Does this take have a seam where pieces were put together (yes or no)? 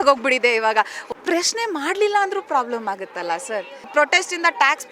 yes